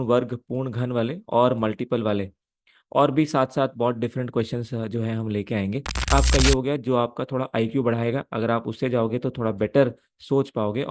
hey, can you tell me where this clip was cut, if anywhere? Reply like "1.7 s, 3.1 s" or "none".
6.0 s